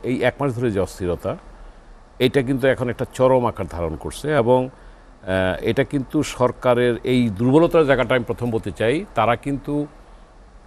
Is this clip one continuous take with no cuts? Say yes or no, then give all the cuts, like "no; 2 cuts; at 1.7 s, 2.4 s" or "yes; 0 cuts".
yes; 0 cuts